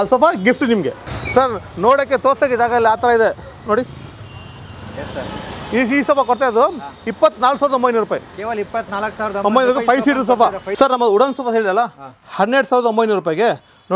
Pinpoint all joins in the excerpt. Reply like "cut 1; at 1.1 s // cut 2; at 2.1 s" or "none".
cut 1; at 1.0 s // cut 2; at 10.6 s